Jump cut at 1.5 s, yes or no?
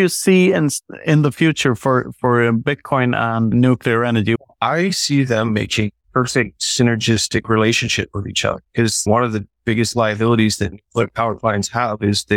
no